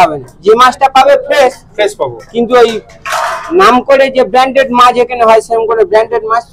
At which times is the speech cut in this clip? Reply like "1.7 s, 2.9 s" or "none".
none